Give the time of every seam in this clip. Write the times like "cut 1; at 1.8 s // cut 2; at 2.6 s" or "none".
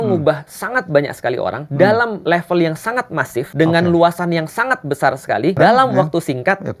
cut 1; at 1.6 s // cut 2; at 2.2 s // cut 3; at 3.5 s // cut 4; at 5.6 s